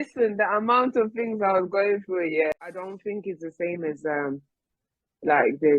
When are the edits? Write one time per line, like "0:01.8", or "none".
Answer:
0:02.5